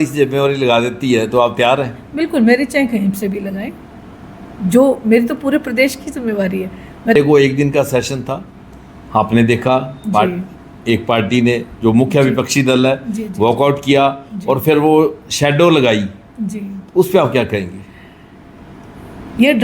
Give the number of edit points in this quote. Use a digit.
1